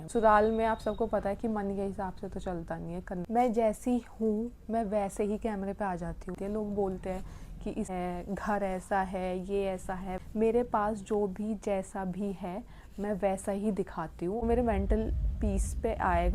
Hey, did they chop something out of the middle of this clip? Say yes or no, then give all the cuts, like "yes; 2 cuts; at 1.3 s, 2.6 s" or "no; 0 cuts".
yes; 5 cuts; at 3.2 s, 6.4 s, 7.9 s, 10.2 s, 14.4 s